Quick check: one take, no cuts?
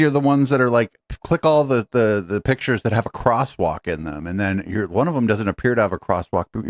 yes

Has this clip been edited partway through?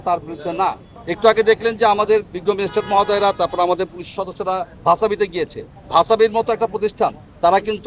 no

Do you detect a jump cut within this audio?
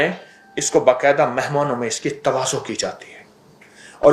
no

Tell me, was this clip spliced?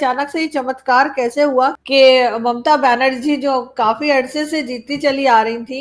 yes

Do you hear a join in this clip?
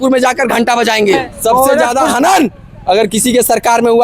yes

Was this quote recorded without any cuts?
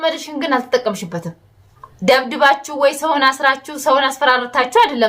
no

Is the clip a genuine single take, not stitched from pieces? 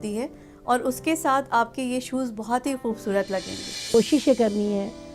no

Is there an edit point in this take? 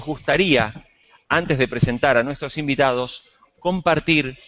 no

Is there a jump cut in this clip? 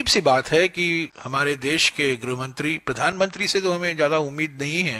yes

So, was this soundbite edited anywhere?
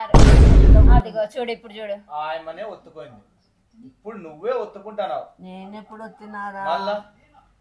yes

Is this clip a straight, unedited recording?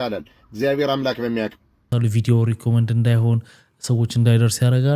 no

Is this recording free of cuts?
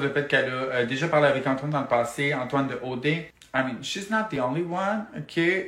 yes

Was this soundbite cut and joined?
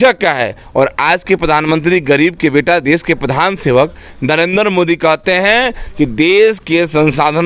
no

